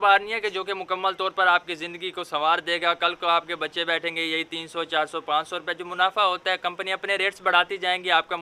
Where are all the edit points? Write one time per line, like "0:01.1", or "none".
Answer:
none